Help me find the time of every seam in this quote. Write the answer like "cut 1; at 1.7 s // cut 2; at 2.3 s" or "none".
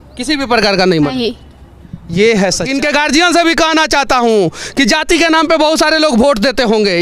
cut 1; at 2.7 s